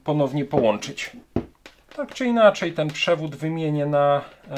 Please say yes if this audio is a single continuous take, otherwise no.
no